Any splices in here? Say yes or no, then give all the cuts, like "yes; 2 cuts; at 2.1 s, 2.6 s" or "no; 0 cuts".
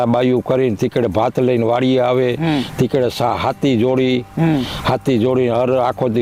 no; 0 cuts